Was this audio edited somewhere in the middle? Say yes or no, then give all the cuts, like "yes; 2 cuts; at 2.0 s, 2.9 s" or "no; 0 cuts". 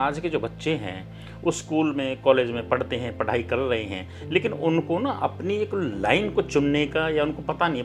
no; 0 cuts